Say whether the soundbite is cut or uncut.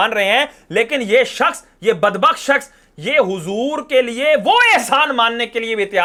uncut